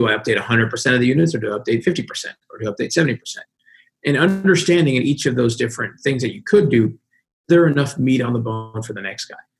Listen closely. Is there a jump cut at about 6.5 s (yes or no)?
no